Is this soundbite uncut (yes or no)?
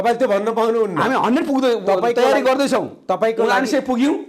yes